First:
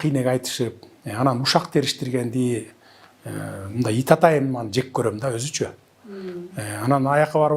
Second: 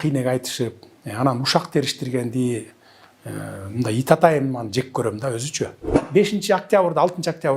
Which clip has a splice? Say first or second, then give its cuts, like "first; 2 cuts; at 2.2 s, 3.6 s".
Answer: second; 1 cut; at 6.0 s